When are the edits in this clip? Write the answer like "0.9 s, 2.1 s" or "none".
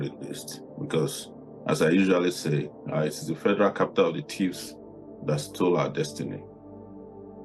6.4 s